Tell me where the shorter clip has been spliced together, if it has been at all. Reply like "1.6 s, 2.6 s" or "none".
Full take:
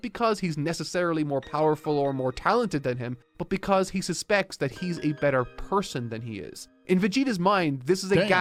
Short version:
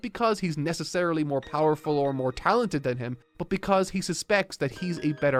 none